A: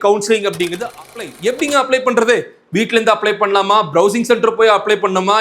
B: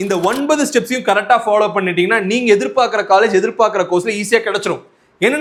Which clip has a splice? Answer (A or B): A